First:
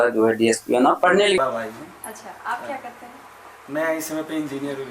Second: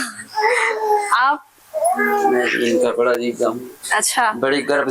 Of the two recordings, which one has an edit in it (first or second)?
first